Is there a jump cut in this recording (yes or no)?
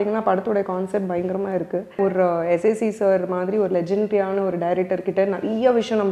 yes